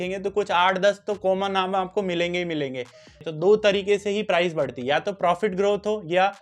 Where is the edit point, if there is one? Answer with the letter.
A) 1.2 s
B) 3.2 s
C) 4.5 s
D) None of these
B